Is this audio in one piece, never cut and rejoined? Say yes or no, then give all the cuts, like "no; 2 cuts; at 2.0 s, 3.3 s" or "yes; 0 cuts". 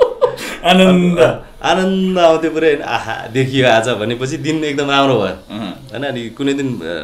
yes; 0 cuts